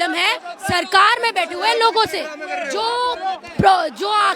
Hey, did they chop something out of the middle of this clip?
no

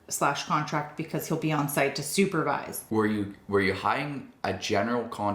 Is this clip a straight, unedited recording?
no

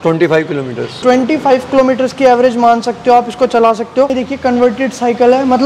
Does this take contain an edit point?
yes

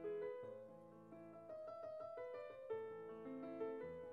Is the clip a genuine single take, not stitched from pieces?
yes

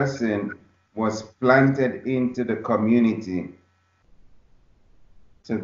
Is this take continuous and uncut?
yes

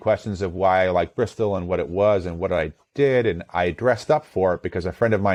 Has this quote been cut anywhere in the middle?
no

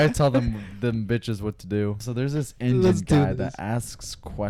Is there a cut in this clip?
yes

